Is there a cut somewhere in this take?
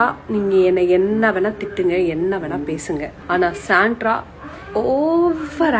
yes; 1 cut; at 3.1 s

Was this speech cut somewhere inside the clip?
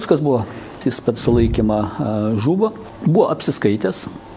yes; 2 cuts; at 0.8 s, 2.9 s

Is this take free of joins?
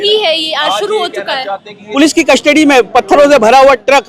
no; 1 cut; at 1.8 s

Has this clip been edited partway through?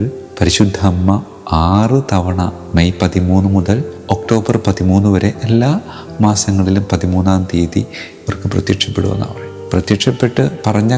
no; 0 cuts

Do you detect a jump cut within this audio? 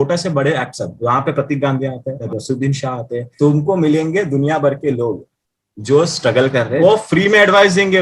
yes; 3 cuts; at 2.2 s, 3.2 s, 6.8 s

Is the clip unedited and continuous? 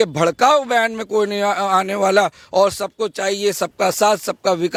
yes; 0 cuts

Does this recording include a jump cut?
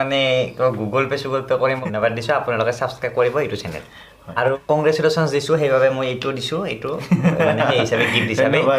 yes; 2 cuts; at 1.8 s, 4.5 s

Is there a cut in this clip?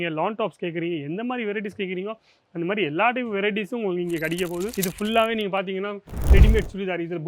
yes; 1 cut; at 4.7 s

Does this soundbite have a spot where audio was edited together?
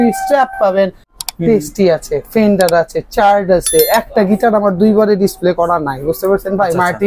yes; 1 cut; at 1.2 s

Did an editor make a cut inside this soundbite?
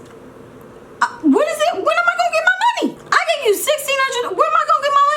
yes; 1 cut; at 3.0 s

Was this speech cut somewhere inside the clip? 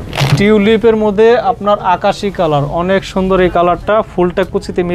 no; 0 cuts

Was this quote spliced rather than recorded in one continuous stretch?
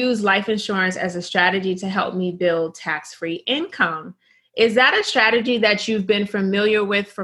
no; 0 cuts

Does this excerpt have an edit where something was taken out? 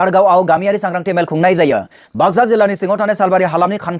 yes; 1 cut; at 2.0 s

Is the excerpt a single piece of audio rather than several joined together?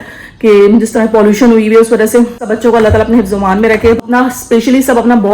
no; 2 cuts; at 2.4 s, 4.0 s

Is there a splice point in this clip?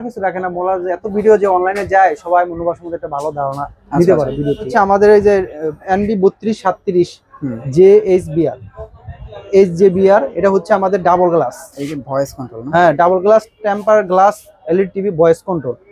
yes; 1 cut; at 4.7 s

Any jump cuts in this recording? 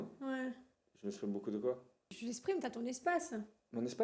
yes; 1 cut; at 2.2 s

